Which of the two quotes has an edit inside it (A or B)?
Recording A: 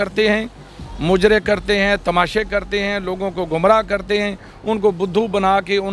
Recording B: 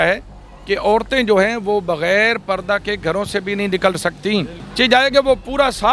B